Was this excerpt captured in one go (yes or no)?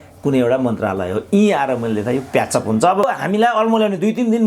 no